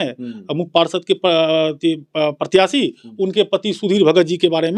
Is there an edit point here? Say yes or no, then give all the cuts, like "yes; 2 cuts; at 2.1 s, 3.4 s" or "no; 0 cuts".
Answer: no; 0 cuts